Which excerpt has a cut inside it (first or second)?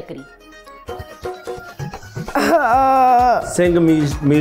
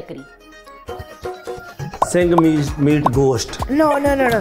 second